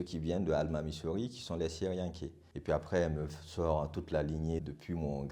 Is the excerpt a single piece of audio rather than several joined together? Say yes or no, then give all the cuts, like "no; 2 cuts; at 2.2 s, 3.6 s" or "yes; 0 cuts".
yes; 0 cuts